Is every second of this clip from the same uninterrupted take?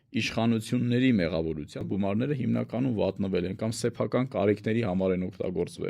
no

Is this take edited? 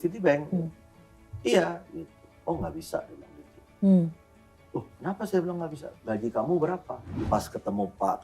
yes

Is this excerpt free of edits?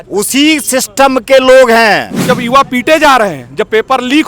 no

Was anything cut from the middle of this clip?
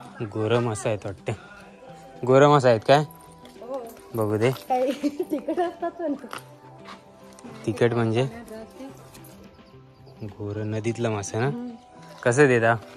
no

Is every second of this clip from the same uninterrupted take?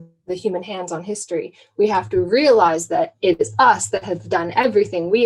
yes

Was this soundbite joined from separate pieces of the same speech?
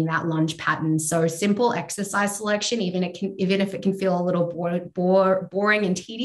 no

